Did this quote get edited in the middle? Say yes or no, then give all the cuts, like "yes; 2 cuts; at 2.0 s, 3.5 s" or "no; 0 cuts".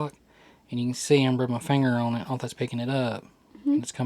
no; 0 cuts